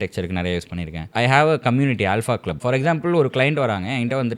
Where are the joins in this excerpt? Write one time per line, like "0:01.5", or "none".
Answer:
0:01.0
0:02.5